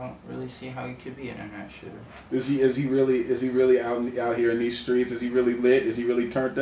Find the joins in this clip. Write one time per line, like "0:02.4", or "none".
none